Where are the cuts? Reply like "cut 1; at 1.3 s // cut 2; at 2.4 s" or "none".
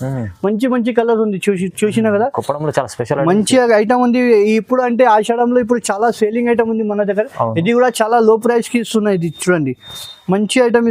none